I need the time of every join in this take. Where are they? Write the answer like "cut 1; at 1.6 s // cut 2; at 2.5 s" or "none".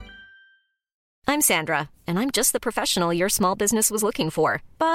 cut 1; at 1.0 s